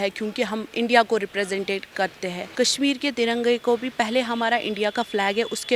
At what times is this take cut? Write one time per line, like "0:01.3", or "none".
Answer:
0:02.4

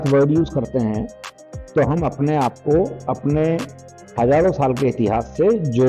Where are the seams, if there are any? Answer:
none

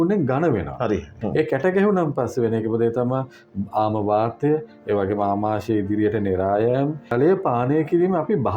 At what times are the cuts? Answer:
0:01.1
0:07.1

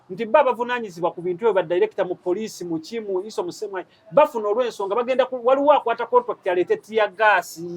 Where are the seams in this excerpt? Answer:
none

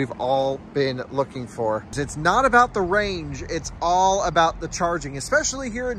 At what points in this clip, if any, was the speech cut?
0:02.0

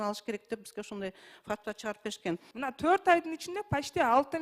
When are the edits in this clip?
0:02.5

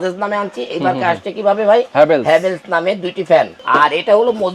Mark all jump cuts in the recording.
0:03.6

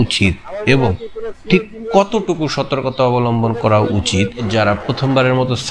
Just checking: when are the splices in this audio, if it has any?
0:04.4

